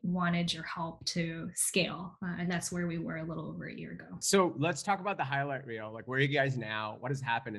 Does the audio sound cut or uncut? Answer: cut